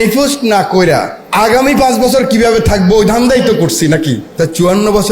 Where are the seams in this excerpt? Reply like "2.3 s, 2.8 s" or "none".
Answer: 1.2 s, 4.2 s